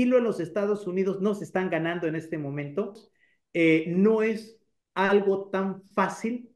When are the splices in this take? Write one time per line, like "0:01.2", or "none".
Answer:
0:03.1

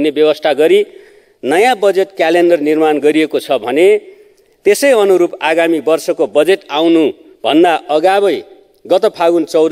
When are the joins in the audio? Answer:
none

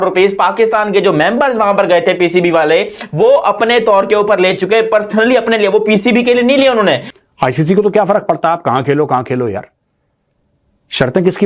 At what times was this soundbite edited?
0:07.1

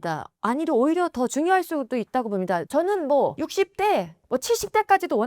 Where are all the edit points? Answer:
0:02.7
0:03.4

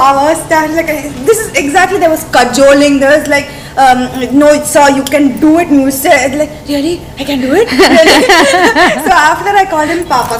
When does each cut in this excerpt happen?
none

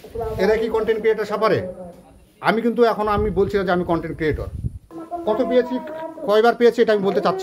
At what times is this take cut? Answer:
0:04.8

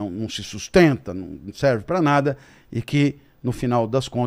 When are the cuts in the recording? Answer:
none

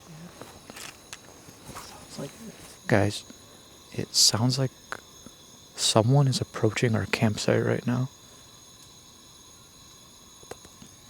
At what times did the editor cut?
0:02.8

